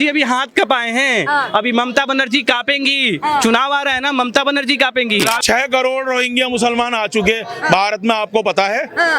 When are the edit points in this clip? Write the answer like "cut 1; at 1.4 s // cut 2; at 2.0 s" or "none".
cut 1; at 5.4 s

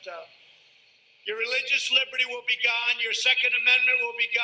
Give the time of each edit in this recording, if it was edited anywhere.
cut 1; at 3.2 s

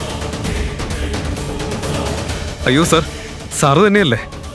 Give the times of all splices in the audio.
cut 1; at 2.4 s

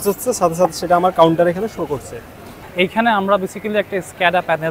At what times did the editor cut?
cut 1; at 2.6 s

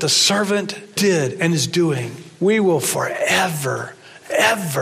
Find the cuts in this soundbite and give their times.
cut 1; at 0.9 s // cut 2; at 2.2 s

